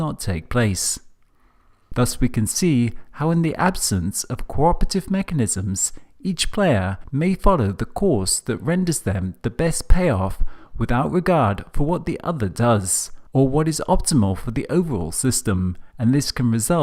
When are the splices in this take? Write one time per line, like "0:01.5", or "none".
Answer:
none